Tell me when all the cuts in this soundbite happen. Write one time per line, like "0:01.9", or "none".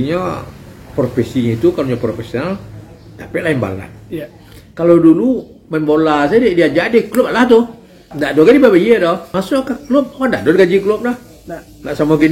0:08.2
0:09.3